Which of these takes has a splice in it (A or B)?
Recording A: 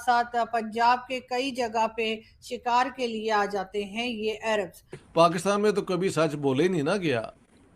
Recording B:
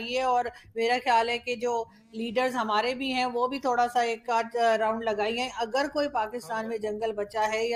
A